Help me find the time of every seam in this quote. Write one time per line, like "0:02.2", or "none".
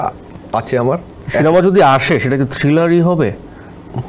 0:01.2